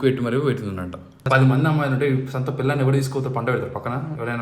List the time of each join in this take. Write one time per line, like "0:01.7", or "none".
0:01.2